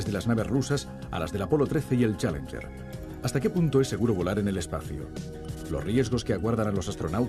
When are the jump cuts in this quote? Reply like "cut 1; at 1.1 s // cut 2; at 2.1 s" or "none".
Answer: cut 1; at 3.9 s

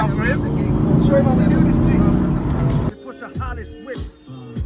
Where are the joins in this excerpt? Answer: cut 1; at 2.9 s

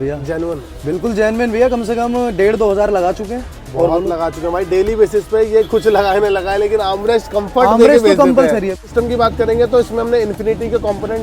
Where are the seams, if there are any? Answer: cut 1; at 8.8 s

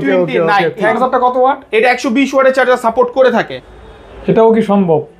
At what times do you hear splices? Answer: cut 1; at 0.9 s // cut 2; at 3.5 s

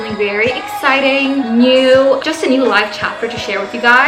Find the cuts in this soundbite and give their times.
none

